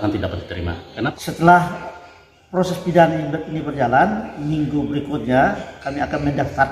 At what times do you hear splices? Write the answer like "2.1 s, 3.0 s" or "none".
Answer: 1.1 s